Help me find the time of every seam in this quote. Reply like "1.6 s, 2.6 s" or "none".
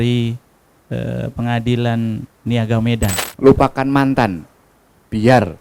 3.2 s